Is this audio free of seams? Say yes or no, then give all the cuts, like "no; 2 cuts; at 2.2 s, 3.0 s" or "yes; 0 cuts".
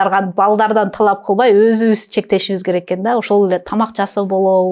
yes; 0 cuts